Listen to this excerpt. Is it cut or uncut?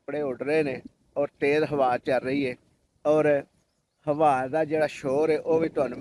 uncut